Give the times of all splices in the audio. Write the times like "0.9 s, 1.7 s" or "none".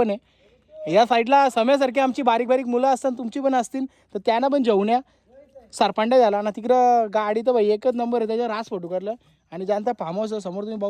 none